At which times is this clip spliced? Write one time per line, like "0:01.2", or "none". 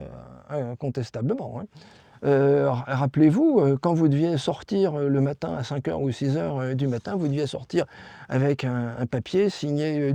none